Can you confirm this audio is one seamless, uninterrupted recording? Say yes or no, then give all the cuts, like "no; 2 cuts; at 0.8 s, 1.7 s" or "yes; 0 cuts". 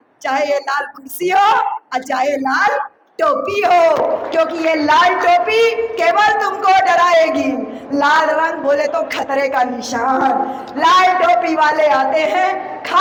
yes; 0 cuts